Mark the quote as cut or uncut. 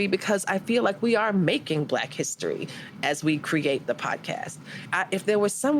cut